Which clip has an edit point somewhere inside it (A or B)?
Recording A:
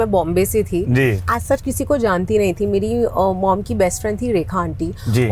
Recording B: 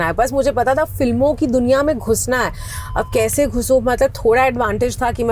A